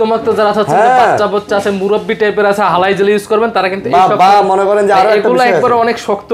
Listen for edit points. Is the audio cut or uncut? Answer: uncut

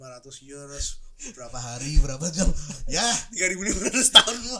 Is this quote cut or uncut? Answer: uncut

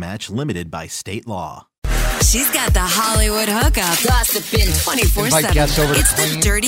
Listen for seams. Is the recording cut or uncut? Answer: cut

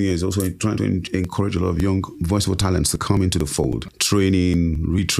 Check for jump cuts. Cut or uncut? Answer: cut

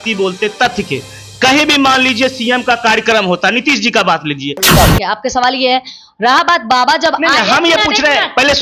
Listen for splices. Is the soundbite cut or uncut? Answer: cut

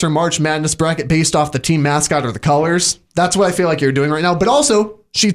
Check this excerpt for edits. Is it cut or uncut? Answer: uncut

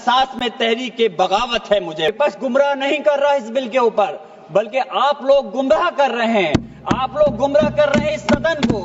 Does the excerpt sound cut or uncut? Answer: cut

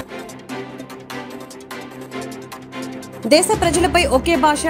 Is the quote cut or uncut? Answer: cut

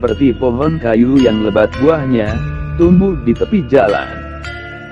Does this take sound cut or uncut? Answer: uncut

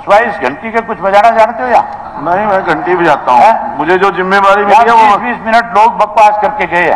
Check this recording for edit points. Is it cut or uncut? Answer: uncut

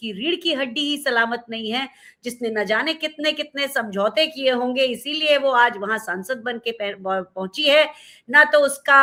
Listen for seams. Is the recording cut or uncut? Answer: uncut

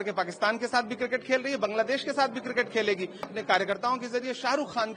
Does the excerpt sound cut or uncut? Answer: cut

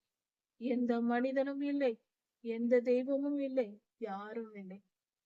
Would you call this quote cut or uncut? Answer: uncut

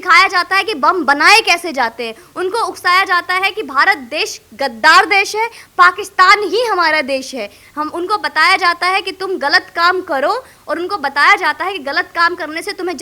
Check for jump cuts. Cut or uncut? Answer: uncut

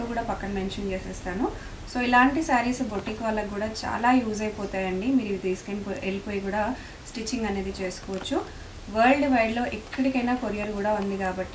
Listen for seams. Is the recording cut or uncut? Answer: uncut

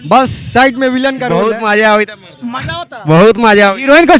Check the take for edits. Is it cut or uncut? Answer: cut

